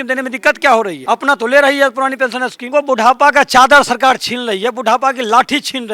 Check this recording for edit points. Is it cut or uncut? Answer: cut